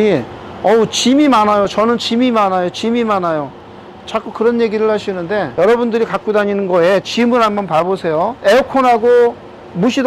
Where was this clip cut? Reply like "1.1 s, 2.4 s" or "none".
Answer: none